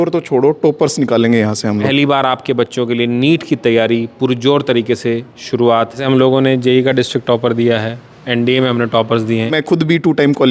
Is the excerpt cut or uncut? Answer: cut